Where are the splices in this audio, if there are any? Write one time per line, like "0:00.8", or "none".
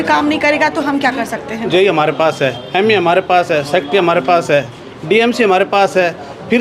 0:01.6